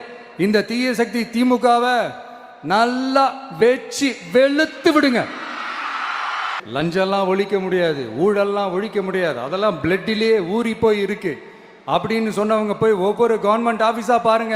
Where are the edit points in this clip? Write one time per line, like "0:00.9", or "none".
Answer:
0:06.5